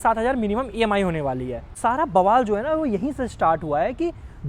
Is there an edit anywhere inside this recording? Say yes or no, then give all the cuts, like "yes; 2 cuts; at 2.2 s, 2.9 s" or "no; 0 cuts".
yes; 1 cut; at 1.7 s